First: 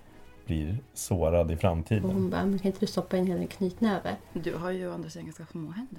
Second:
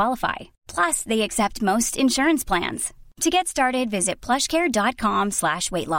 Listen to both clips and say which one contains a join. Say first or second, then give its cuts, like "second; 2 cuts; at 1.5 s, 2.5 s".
first; 2 cuts; at 2.0 s, 4.3 s